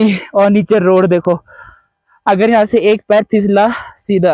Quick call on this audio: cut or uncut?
uncut